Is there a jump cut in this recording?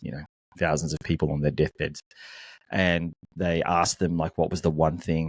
no; 0 cuts

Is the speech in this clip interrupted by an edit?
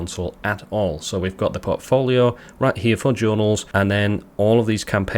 yes; 1 cut; at 3.7 s

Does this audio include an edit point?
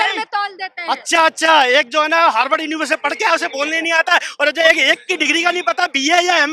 no; 0 cuts

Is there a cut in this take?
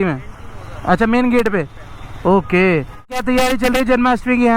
yes; 1 cut; at 3.1 s

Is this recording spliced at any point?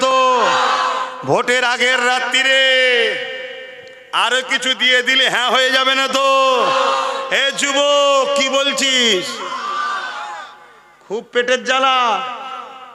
no; 0 cuts

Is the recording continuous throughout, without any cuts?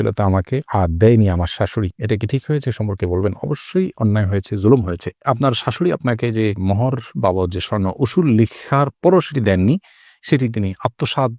yes; 0 cuts

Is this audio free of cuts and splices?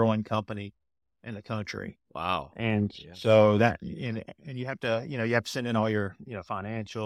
yes; 0 cuts

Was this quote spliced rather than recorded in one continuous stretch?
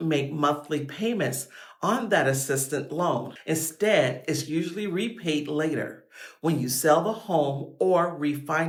no; 0 cuts

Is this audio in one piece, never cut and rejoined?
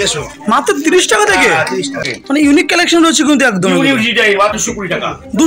no; 2 cuts; at 2.1 s, 4.5 s

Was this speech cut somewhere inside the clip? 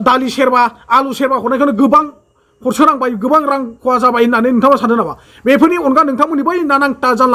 no; 0 cuts

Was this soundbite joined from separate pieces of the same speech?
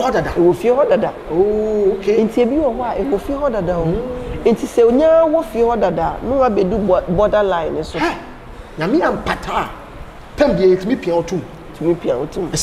no; 0 cuts

